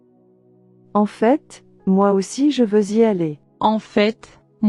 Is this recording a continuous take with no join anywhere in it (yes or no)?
yes